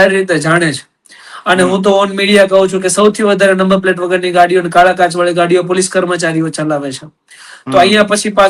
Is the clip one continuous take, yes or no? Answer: yes